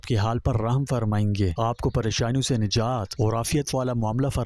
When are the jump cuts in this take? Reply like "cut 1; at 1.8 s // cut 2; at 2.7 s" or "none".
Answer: cut 1; at 1.5 s // cut 2; at 3.1 s